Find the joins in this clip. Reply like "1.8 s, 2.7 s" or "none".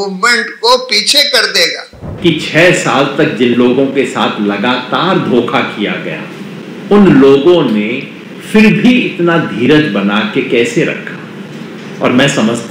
2.0 s